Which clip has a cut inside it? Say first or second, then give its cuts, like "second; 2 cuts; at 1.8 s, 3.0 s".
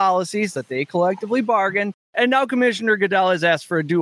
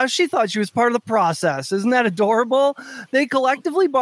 first; 1 cut; at 2.0 s